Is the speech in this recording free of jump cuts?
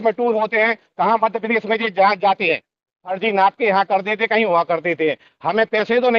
no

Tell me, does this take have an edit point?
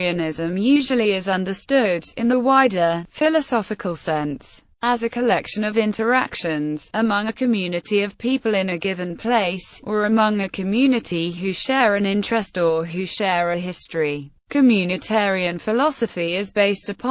no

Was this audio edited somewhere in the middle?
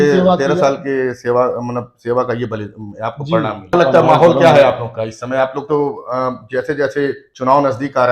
yes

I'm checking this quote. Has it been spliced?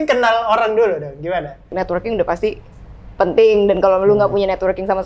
yes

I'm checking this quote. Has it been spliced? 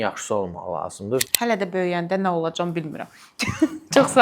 yes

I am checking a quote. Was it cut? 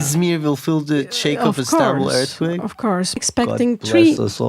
yes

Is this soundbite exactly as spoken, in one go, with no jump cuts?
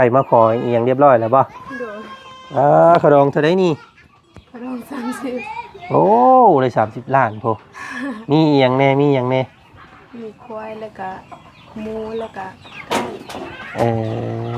yes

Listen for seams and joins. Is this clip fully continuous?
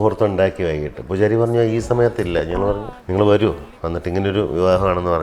no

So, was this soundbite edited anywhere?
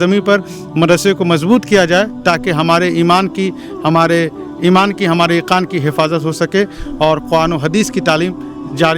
no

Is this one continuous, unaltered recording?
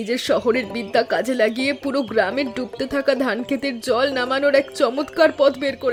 yes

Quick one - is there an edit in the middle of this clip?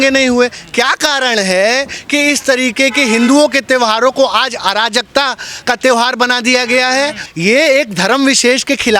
yes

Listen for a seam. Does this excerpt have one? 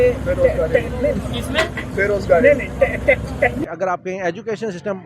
yes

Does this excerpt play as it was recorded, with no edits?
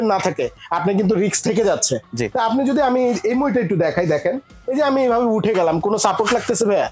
yes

